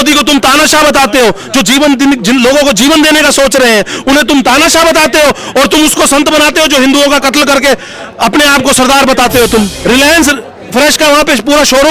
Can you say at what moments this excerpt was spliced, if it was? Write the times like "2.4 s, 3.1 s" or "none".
9.8 s